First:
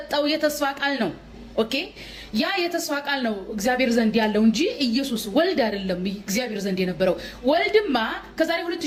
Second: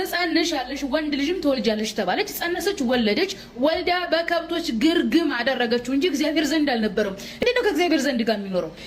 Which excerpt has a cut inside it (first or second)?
second